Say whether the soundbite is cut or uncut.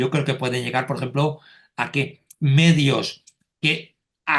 uncut